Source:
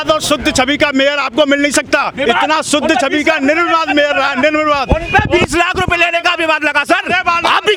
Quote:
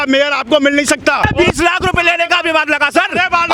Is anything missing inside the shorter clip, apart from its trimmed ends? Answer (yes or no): yes